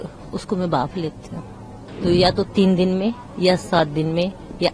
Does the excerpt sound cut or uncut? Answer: cut